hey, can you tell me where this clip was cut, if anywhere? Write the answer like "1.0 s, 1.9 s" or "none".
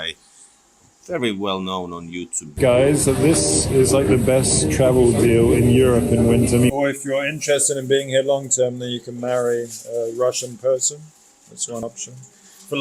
2.5 s, 6.7 s

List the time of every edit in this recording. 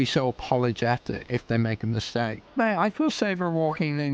1.2 s, 2.4 s

